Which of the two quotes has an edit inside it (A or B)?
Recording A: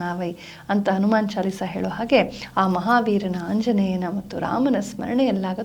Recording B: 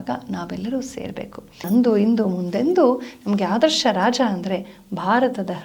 B